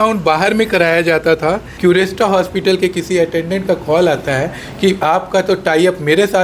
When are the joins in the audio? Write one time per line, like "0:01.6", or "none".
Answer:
0:01.7